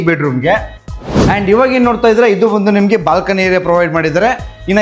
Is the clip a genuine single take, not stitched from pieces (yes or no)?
no